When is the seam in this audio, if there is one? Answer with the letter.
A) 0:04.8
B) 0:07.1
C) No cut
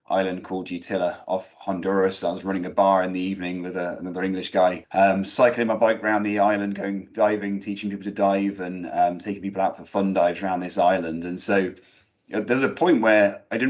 A